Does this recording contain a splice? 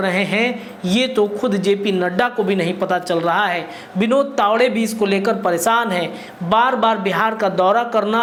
no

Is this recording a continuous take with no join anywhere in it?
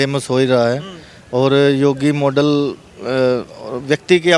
yes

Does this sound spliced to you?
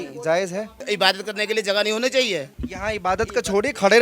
yes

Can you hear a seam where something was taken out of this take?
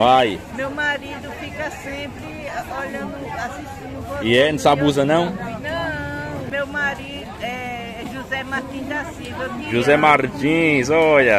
yes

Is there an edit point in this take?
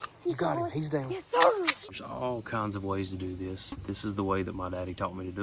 yes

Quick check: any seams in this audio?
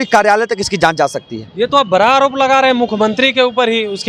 no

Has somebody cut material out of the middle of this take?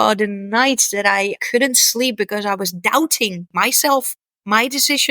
yes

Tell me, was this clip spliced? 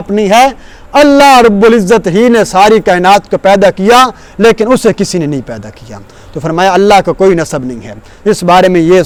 no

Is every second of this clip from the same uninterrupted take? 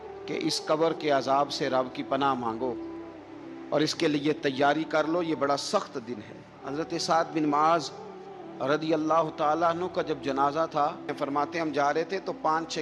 no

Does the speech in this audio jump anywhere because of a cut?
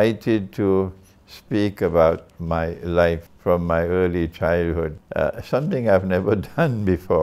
yes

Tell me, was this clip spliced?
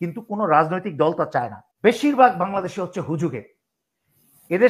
yes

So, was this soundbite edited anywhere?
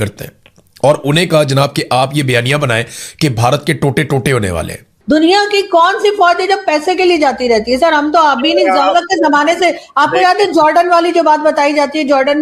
yes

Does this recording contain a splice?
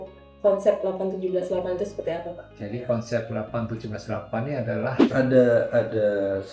yes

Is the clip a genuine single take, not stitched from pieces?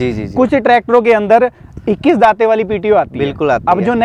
yes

